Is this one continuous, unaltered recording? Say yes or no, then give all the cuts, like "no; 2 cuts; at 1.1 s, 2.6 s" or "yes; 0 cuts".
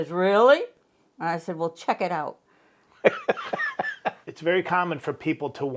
no; 1 cut; at 4.3 s